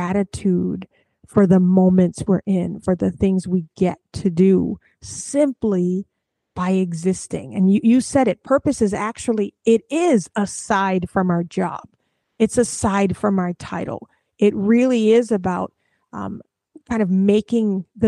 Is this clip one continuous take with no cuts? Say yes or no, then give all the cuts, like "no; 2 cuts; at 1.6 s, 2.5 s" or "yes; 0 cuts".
yes; 0 cuts